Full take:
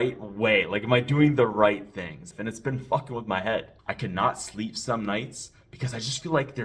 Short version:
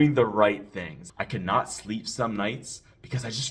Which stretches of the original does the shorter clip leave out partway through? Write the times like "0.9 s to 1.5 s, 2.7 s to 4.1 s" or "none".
2.3 s to 3.7 s